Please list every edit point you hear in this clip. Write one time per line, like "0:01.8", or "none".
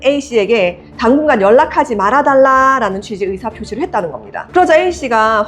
0:04.3